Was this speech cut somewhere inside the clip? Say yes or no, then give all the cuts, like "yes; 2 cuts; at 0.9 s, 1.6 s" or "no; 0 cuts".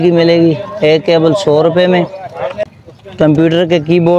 yes; 1 cut; at 2.7 s